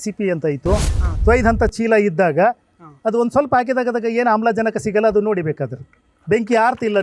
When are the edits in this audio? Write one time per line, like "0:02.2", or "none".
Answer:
0:01.1